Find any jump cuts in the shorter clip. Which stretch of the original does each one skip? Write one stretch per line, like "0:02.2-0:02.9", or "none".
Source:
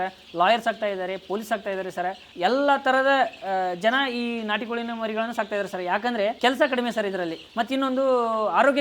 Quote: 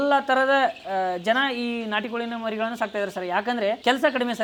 none